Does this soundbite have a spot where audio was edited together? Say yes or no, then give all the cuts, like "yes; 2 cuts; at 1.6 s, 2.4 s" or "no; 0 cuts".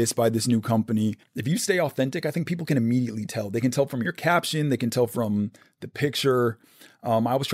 yes; 1 cut; at 1.3 s